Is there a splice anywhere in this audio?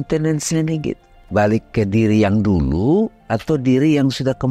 yes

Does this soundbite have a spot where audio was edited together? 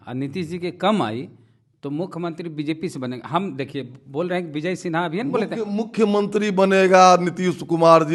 no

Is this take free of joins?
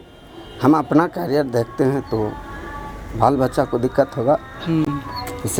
yes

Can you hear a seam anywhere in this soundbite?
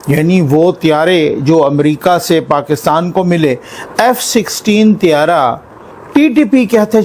no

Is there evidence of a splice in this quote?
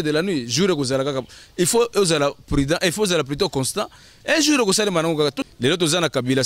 yes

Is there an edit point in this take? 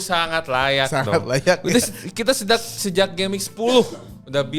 no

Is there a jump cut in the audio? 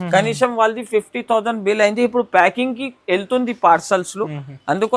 no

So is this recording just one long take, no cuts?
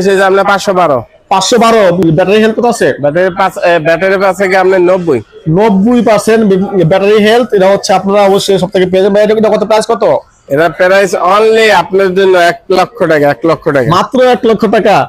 yes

